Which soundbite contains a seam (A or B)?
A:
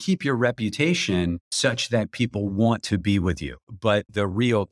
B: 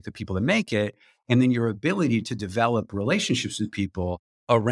A